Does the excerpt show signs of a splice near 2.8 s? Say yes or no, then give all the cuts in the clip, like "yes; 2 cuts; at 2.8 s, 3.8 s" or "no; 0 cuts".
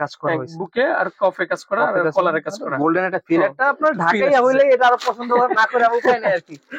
no; 0 cuts